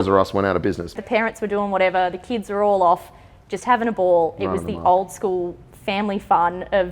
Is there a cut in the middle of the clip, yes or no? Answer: yes